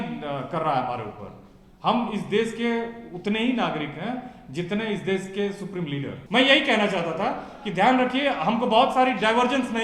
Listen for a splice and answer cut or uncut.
cut